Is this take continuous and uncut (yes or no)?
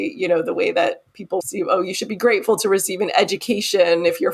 no